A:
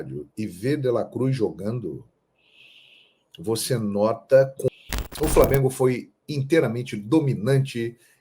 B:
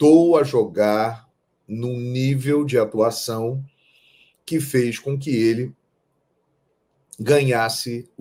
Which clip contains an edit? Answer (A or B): A